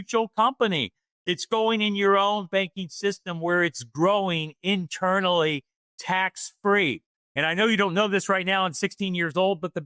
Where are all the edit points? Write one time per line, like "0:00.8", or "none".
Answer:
none